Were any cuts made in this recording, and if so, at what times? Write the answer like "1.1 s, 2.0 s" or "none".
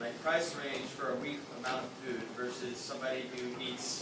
none